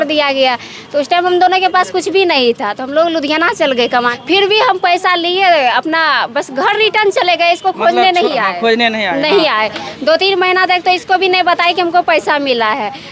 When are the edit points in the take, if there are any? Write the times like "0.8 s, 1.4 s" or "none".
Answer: 4.1 s, 9.9 s

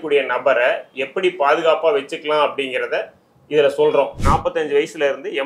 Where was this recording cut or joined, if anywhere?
4.2 s

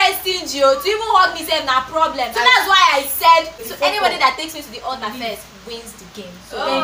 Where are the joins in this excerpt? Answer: 3.6 s

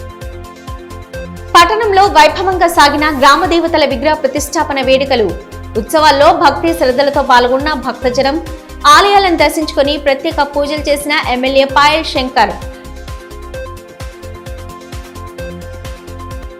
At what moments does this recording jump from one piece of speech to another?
0.9 s

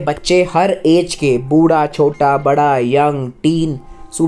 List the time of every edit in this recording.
none

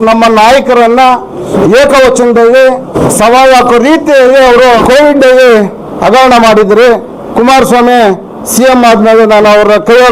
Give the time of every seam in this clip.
1.5 s, 2.9 s, 4.8 s

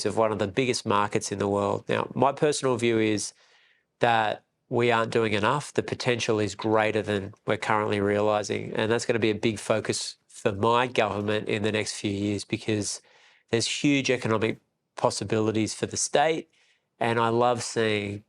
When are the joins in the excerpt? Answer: none

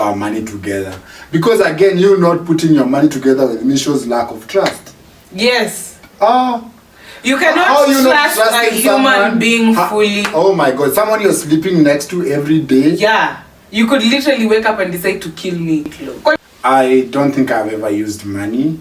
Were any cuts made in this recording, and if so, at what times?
16.4 s

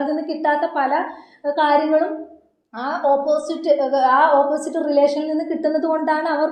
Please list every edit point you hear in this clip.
none

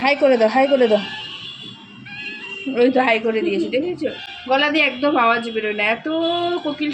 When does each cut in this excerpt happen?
none

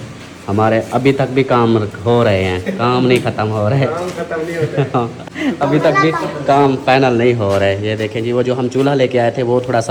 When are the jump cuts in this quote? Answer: none

